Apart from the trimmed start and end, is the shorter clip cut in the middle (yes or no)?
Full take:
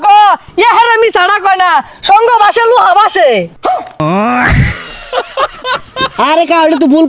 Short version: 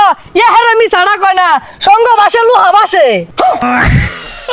yes